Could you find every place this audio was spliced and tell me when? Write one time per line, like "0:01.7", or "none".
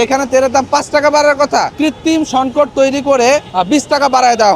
0:01.7
0:03.5